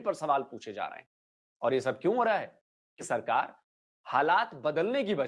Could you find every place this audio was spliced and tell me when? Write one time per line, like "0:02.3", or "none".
0:03.0